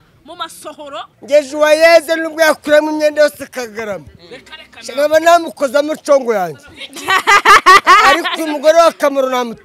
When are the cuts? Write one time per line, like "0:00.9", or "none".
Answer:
0:01.1

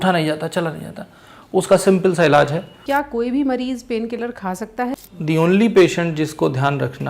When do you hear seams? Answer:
0:02.7
0:04.9

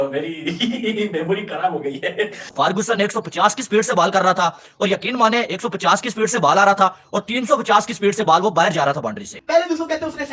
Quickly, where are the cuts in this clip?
0:02.4
0:09.3

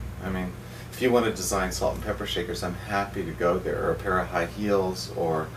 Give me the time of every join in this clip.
0:03.1

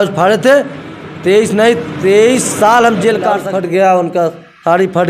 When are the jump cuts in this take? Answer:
0:03.4

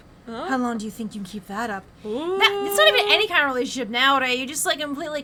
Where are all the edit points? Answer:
none

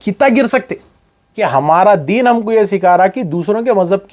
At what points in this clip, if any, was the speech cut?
0:01.4

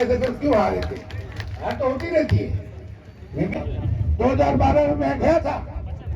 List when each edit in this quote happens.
0:03.5

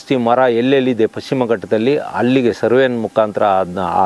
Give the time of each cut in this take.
none

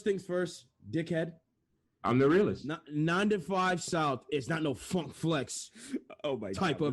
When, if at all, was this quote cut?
none

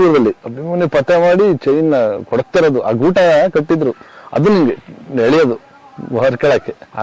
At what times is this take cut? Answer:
none

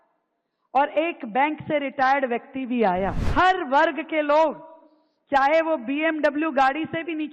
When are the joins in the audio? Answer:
0:03.2

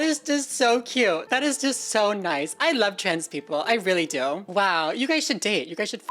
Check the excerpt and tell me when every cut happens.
0:01.2
0:04.4

